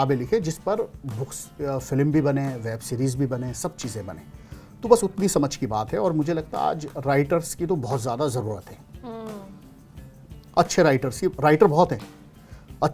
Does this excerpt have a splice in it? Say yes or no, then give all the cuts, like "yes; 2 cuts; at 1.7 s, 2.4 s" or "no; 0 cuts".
no; 0 cuts